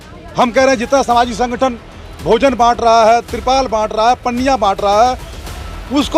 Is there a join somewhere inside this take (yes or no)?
no